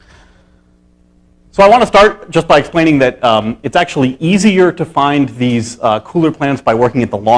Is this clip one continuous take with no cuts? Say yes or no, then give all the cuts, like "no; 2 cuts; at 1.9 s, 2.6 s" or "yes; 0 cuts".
yes; 0 cuts